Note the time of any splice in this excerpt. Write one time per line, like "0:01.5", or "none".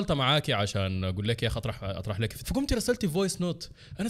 0:02.4